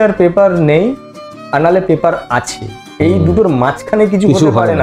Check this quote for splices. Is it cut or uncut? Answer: uncut